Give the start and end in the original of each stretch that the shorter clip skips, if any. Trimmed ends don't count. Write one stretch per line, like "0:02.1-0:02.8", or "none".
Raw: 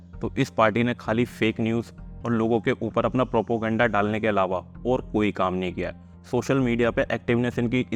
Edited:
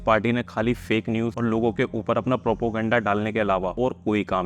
0:01.9-0:02.2
0:04.6-0:04.8